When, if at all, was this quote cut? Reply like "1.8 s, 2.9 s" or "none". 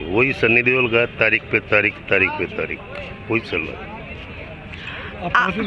none